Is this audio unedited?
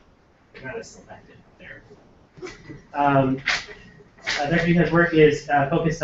no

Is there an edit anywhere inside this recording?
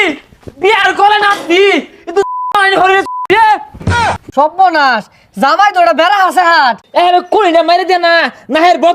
yes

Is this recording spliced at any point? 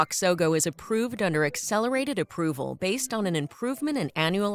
no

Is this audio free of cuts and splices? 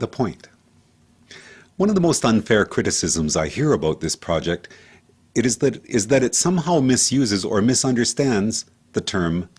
yes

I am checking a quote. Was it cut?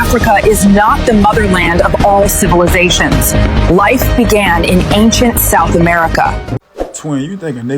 yes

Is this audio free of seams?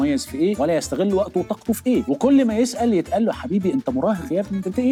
yes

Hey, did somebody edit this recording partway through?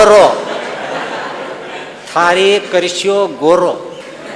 no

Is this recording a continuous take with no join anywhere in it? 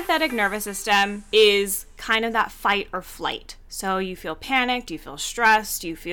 no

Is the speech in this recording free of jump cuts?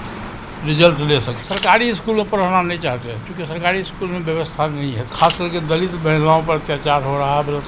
no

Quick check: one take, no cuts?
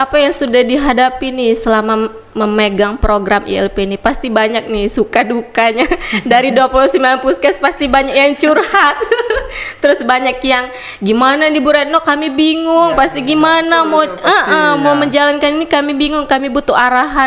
yes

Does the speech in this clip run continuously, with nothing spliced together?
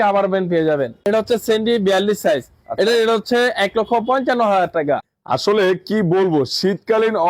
no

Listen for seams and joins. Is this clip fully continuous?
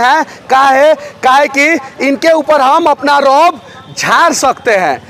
yes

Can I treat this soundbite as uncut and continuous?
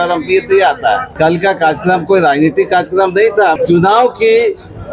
no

